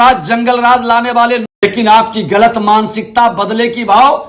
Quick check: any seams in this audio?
no; 0 cuts

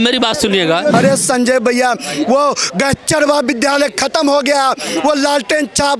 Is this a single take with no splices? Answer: no; 1 cut; at 0.9 s

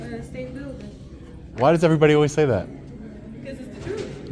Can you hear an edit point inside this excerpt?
no; 0 cuts

